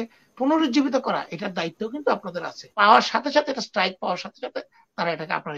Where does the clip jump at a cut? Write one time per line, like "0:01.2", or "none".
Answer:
0:02.7